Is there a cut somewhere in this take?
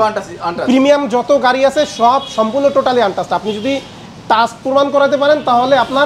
no; 0 cuts

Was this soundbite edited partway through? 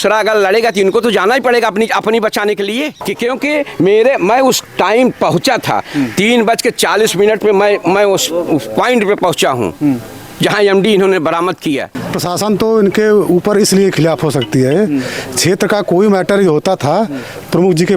yes; 2 cuts; at 3.0 s, 11.9 s

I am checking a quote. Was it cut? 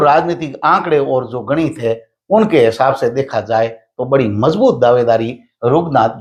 no; 0 cuts

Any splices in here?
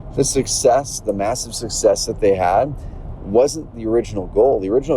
yes; 1 cut; at 3.7 s

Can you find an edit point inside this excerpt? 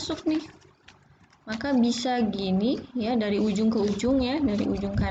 no; 0 cuts

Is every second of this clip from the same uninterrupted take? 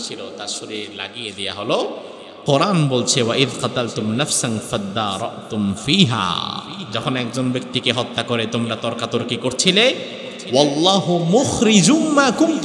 no; 1 cut; at 6.8 s

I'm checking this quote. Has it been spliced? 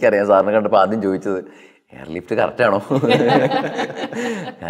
no; 0 cuts

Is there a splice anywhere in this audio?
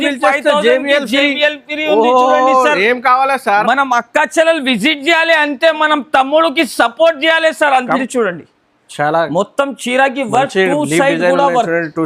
yes; 1 cut; at 8.0 s

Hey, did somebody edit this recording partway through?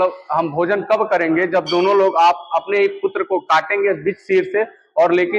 no; 0 cuts

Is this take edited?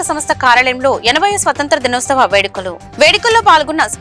no; 0 cuts

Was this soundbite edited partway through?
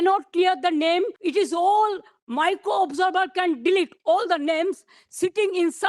yes; 1 cut; at 1.2 s

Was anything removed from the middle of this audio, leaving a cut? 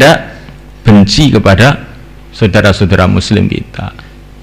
no; 0 cuts

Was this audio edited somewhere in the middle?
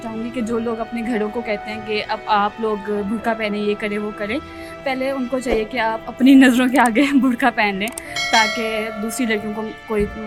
no; 0 cuts

